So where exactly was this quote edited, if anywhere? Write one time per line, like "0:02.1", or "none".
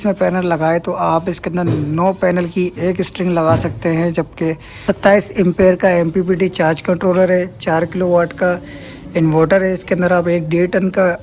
0:04.7